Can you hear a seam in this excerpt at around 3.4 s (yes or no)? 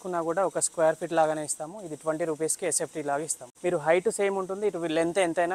yes